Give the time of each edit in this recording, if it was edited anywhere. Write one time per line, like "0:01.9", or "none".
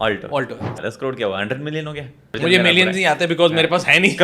0:00.8
0:02.4